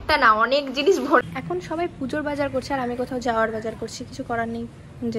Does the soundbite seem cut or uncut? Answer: cut